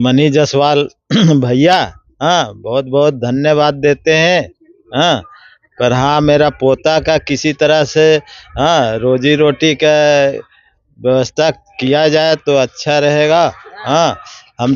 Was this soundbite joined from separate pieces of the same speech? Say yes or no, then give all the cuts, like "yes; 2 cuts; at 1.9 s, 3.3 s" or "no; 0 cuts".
no; 0 cuts